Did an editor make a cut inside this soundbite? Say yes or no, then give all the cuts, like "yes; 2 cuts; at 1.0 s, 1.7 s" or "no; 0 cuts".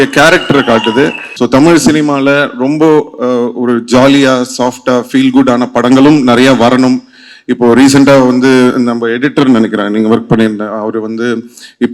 yes; 1 cut; at 1.2 s